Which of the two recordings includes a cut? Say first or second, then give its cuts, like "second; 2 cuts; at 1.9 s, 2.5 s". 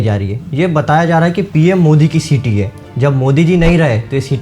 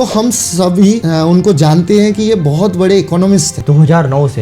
second; 2 cuts; at 1.0 s, 3.5 s